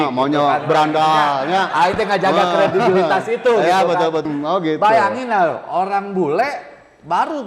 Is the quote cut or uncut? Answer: cut